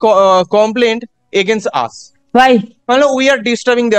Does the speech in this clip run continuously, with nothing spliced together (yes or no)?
no